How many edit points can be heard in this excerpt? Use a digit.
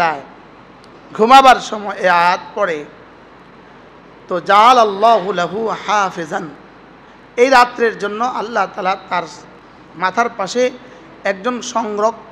0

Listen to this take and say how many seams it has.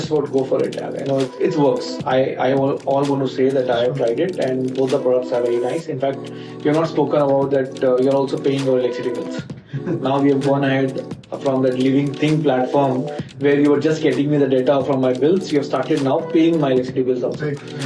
0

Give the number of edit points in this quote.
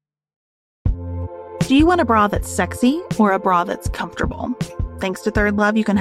1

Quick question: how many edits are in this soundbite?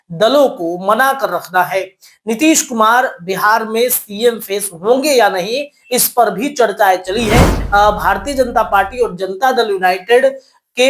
1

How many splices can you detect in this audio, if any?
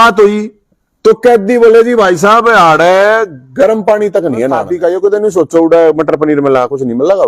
1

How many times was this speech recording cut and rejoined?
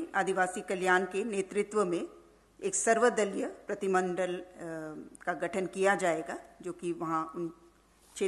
0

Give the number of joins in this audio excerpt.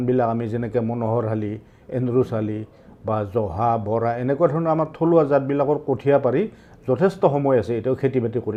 0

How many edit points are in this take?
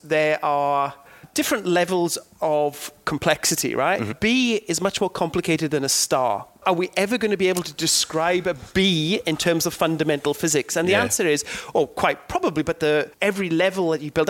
4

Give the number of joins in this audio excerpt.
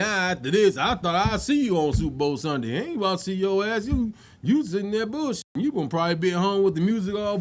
0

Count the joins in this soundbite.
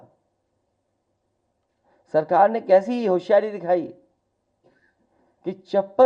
0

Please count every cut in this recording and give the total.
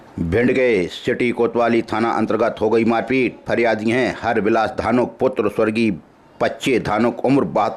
0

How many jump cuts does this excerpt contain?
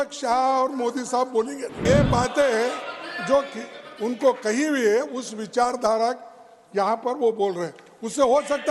1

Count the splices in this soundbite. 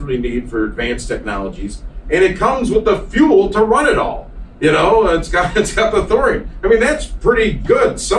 0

